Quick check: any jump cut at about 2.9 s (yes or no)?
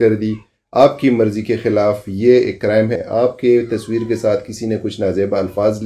yes